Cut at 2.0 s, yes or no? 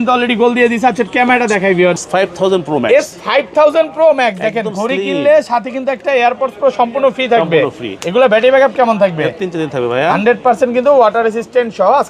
yes